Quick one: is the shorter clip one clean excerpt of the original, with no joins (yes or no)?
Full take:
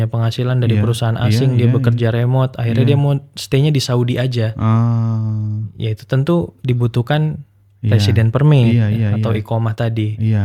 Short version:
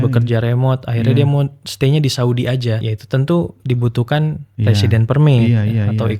no